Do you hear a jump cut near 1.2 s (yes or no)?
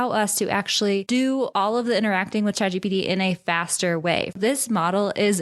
no